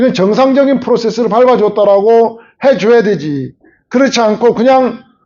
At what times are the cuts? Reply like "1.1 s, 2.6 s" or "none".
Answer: none